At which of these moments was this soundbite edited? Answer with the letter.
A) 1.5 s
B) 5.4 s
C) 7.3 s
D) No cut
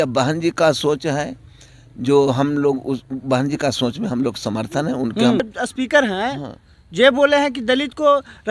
B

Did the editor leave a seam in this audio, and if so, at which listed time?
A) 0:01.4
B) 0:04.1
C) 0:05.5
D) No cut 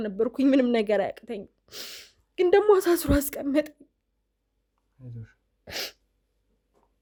D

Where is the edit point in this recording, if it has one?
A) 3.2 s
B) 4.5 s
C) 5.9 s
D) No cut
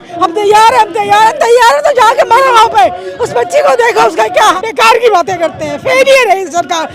B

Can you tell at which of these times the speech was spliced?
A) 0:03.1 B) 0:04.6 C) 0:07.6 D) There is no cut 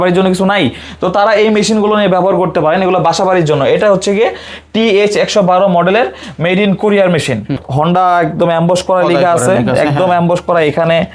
C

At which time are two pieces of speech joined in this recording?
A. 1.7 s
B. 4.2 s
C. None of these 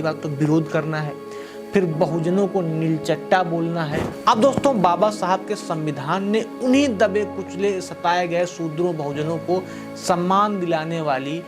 B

